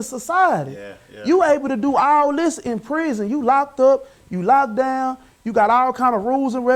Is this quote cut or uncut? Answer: uncut